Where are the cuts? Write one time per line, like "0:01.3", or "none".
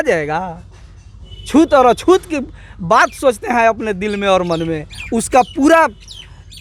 none